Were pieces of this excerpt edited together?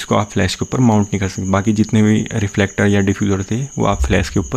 no; 0 cuts

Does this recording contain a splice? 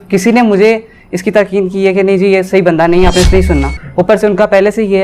yes; 1 cut; at 3.8 s

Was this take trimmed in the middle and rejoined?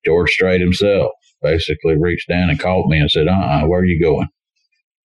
yes; 1 cut; at 1.3 s

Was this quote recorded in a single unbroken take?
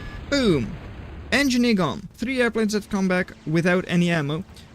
no; 1 cut; at 2.1 s

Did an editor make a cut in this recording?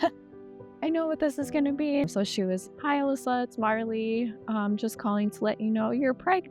yes; 1 cut; at 2.0 s

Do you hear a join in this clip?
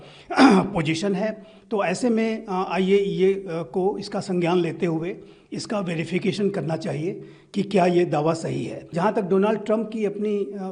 yes; 1 cut; at 8.9 s

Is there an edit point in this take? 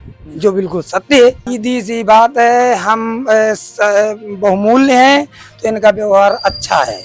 yes; 1 cut; at 1.5 s

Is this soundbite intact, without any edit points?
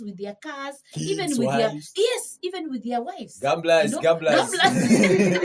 yes; 0 cuts

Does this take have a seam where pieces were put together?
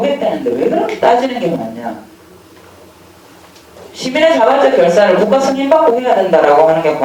no; 0 cuts

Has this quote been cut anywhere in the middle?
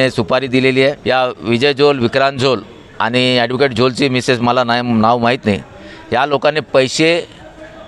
yes; 1 cut; at 1.0 s

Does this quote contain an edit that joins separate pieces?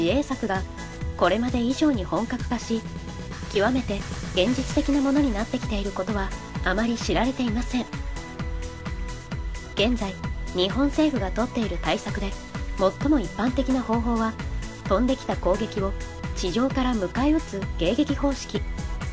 no; 0 cuts

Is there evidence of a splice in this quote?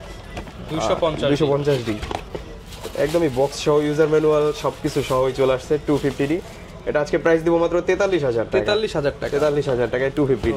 no; 0 cuts

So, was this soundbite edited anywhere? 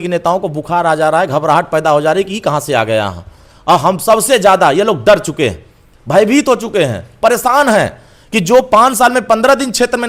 no; 0 cuts

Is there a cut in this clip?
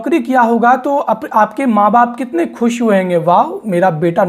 no; 0 cuts

